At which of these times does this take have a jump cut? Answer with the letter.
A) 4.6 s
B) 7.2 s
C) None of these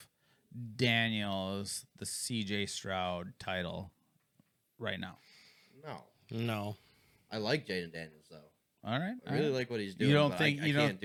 C